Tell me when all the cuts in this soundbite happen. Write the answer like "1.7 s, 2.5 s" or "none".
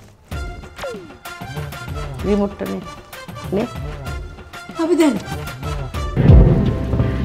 6.0 s